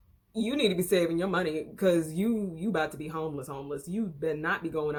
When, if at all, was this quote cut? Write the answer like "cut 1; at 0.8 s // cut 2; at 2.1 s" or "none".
none